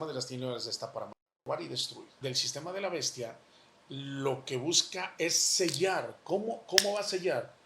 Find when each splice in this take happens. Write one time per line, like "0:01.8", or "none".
0:02.2